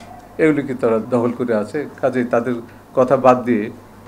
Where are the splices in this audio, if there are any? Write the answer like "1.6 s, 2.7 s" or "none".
1.0 s